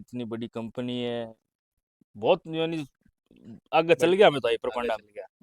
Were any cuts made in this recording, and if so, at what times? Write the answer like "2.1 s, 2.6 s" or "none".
none